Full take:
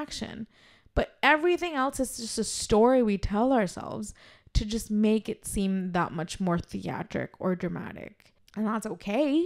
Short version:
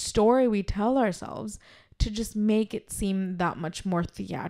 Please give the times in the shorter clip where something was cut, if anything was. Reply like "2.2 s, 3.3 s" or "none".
none